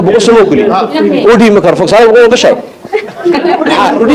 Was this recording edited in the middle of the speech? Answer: no; 0 cuts

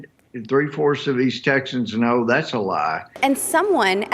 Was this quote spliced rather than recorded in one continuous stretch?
yes; 1 cut; at 3.1 s

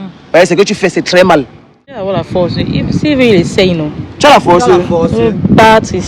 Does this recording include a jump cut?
yes; 1 cut; at 2.0 s

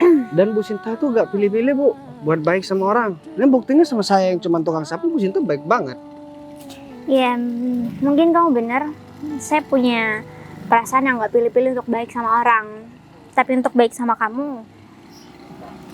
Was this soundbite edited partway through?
no; 0 cuts

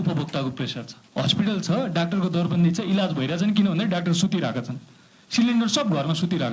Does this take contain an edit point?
yes; 1 cut; at 0.9 s

